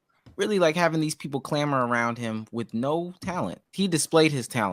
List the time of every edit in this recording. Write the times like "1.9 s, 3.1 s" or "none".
3.7 s